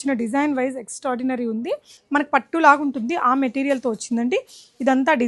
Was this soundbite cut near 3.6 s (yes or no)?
no